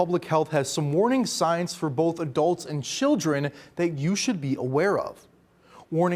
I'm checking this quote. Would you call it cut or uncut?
uncut